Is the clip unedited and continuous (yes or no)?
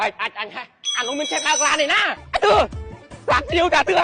no